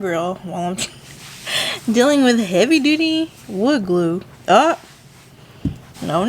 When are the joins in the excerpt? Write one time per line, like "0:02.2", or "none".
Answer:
none